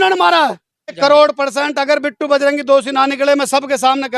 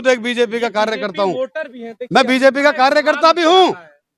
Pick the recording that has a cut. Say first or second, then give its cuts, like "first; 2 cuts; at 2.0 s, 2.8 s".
first; 1 cut; at 1.0 s